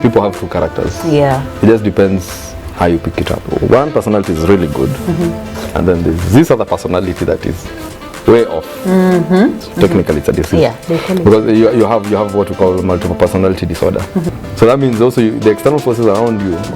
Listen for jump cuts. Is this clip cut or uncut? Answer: cut